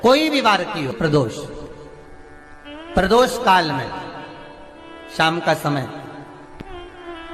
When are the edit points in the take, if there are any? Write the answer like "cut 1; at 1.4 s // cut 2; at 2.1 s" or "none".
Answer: cut 1; at 0.9 s